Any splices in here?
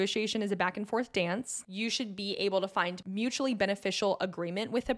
yes; 2 cuts; at 1.6 s, 3.0 s

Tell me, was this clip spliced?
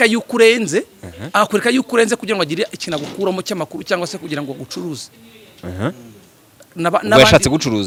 no; 0 cuts

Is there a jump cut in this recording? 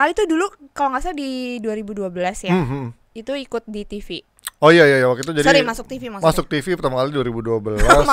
no; 0 cuts

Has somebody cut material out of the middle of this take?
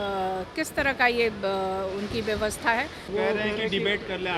yes; 1 cut; at 3.1 s

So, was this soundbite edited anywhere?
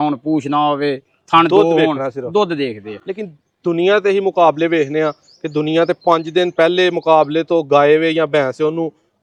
no; 0 cuts

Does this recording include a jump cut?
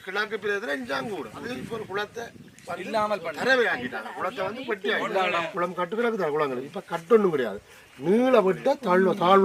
yes; 2 cuts; at 1.5 s, 5.5 s

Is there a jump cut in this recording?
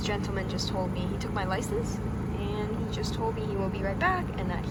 no; 0 cuts

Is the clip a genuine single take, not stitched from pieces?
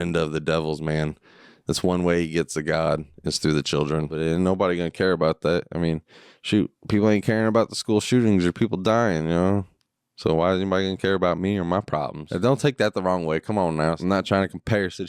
no; 3 cuts; at 4.1 s, 12.2 s, 14.0 s

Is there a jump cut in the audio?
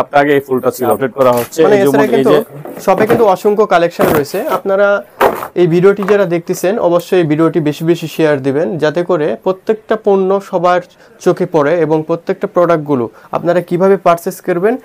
yes; 1 cut; at 1.0 s

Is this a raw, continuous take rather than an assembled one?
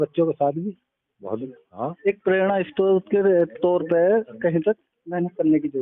yes; 0 cuts

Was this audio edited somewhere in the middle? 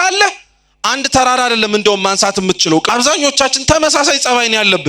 yes; 1 cut; at 2.8 s

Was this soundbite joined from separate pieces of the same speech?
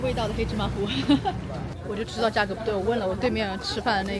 no; 0 cuts

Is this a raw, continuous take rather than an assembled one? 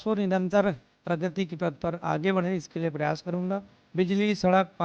no; 1 cut; at 3.8 s

